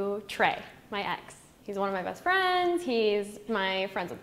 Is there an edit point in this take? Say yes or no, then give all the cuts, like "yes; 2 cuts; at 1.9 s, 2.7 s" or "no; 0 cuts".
no; 0 cuts